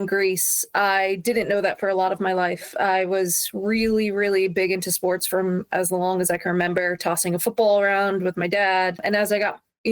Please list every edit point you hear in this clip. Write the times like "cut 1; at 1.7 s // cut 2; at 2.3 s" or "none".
cut 1; at 9.0 s